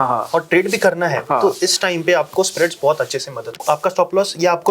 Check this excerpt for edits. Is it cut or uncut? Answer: cut